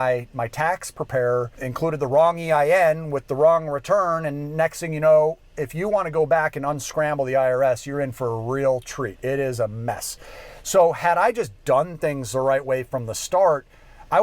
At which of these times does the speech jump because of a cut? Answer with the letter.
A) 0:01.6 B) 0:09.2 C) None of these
A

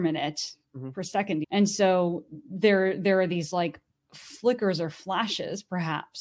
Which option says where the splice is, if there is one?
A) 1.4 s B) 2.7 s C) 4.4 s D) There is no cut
A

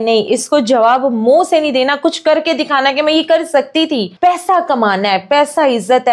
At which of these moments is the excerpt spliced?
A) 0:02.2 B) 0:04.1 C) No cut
B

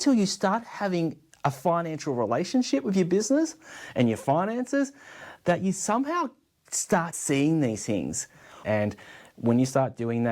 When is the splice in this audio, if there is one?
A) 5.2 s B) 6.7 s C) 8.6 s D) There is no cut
C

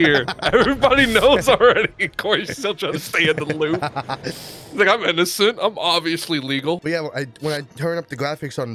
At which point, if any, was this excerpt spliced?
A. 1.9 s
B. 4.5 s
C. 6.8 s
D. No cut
C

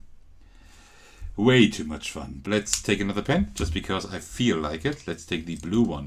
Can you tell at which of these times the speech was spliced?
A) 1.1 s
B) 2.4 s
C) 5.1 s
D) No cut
B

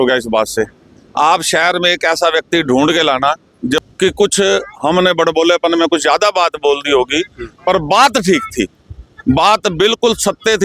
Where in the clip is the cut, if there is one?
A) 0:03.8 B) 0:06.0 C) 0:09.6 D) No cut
A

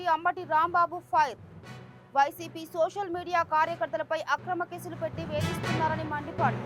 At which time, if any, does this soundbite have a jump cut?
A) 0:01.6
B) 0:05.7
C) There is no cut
C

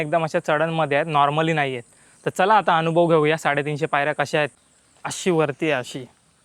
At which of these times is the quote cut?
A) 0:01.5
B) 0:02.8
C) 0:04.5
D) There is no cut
C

